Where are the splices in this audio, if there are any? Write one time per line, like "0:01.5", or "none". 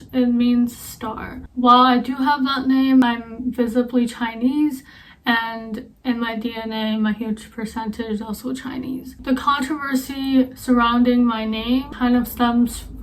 none

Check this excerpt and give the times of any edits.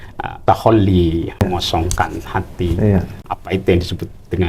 0:01.4

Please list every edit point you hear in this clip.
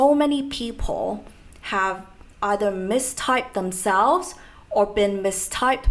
none

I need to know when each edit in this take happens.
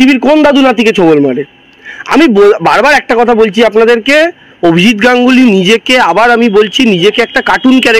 none

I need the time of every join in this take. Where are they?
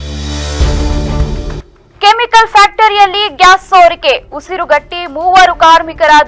0:01.5

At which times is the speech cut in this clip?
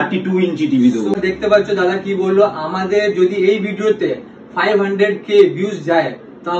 0:01.1

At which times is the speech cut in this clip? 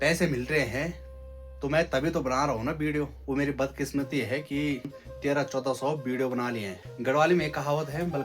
0:03.2
0:04.9
0:06.8

